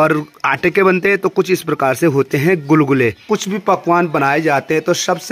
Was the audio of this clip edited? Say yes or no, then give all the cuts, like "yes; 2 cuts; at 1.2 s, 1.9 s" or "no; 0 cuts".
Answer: yes; 1 cut; at 3.2 s